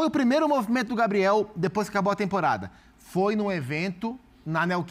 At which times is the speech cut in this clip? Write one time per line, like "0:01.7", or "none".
none